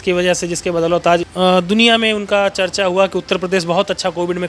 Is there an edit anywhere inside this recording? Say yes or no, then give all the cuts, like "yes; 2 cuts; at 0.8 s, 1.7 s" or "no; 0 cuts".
yes; 1 cut; at 1.3 s